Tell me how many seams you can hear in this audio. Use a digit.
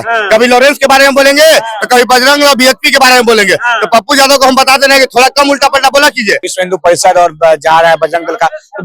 1